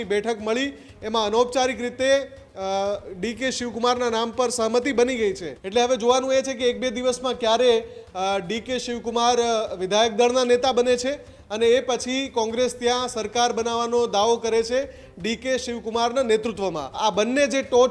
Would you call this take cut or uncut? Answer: cut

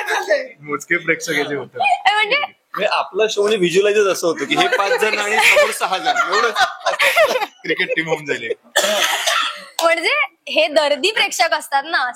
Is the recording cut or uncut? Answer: uncut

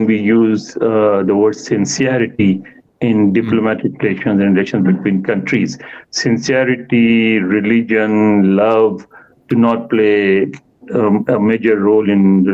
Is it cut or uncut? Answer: uncut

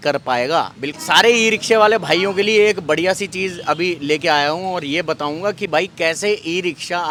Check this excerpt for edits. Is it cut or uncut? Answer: uncut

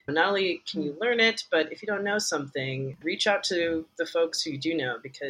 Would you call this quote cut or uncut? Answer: uncut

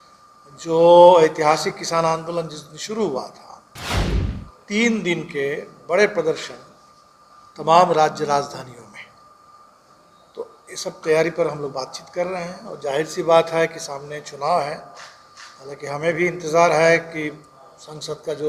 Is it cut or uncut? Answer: uncut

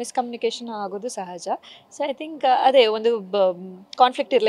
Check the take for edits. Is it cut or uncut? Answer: uncut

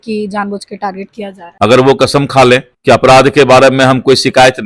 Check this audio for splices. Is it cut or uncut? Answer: cut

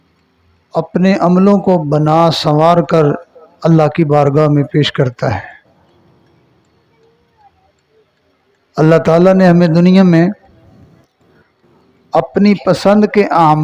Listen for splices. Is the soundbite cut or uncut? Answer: uncut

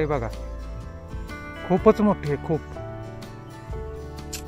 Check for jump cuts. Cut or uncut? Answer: uncut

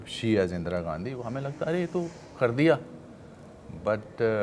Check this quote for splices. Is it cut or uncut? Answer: uncut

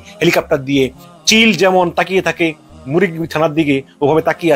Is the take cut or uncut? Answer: cut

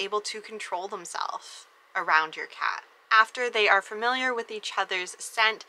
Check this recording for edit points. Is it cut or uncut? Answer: cut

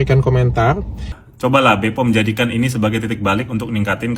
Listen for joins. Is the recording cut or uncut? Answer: cut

